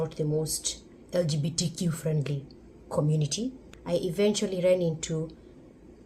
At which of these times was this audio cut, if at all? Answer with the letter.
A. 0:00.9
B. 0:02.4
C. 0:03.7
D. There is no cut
C